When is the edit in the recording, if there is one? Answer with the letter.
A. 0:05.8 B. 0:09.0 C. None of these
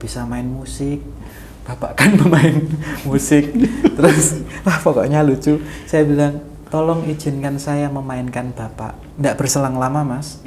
B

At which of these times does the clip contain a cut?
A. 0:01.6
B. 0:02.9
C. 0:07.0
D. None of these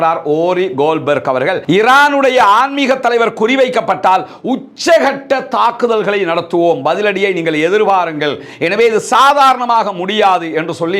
A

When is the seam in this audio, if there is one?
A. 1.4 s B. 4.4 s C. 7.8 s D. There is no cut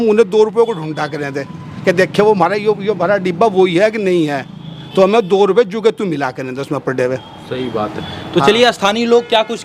D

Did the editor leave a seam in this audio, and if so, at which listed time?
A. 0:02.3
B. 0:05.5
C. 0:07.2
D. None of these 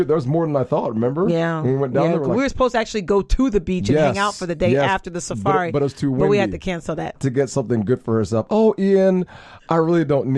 C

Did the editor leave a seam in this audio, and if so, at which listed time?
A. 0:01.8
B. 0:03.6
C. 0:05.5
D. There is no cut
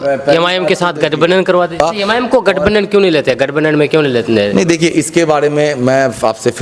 A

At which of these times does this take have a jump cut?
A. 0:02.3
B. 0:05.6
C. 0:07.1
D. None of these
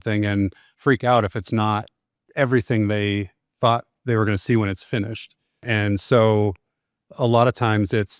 B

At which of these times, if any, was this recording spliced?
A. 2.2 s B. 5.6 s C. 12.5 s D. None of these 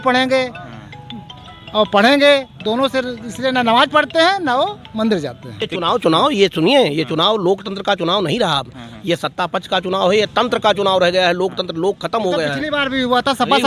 B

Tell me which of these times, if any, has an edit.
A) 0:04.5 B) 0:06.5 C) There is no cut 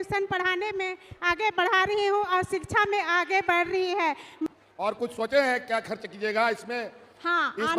A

